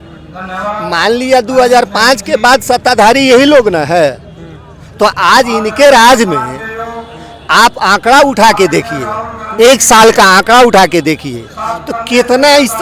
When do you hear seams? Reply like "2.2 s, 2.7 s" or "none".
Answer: none